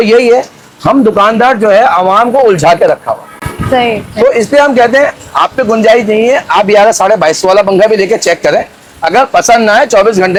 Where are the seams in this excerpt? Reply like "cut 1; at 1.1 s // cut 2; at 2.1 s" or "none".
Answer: none